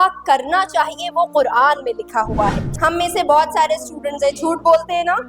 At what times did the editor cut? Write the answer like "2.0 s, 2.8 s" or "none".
2.7 s